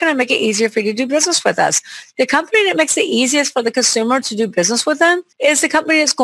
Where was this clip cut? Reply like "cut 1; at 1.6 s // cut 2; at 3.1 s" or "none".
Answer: cut 1; at 5.3 s